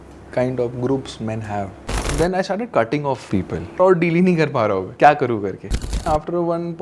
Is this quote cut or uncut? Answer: cut